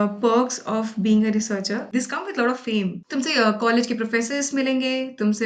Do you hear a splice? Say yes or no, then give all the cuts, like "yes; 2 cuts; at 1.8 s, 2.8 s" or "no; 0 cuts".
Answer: yes; 2 cuts; at 1.8 s, 3.0 s